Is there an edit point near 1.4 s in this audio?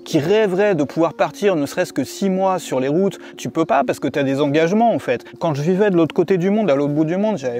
no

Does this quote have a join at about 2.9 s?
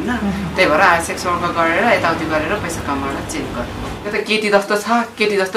no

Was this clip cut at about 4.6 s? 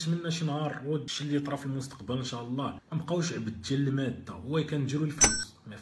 no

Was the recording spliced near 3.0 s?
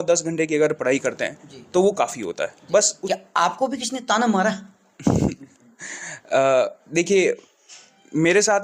yes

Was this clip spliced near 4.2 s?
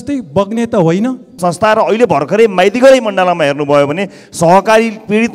no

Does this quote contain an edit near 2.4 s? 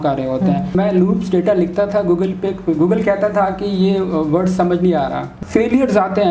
no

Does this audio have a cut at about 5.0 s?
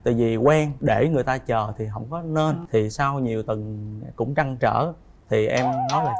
no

